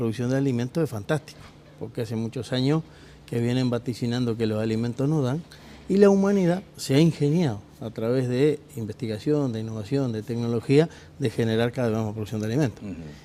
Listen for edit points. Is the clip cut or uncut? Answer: uncut